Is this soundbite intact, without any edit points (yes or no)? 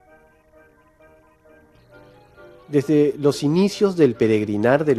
no